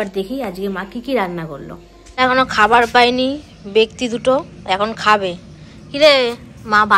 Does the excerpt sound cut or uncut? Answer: cut